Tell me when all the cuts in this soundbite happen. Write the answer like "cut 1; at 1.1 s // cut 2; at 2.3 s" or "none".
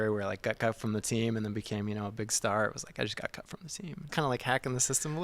cut 1; at 4.1 s